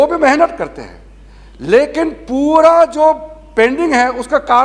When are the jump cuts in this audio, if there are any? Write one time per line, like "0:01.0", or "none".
none